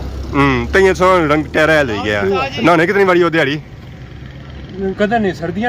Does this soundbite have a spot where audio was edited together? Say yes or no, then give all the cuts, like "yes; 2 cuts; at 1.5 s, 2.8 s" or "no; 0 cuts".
yes; 1 cut; at 2.5 s